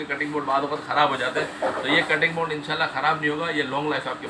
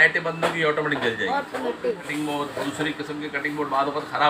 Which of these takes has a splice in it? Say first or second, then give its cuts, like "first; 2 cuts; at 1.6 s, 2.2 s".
second; 1 cut; at 2.0 s